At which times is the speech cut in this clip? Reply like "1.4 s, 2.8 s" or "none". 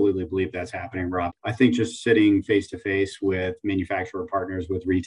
1.3 s